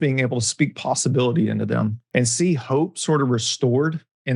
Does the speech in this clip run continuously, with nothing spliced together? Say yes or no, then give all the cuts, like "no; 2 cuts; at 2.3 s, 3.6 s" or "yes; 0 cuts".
no; 1 cut; at 2.0 s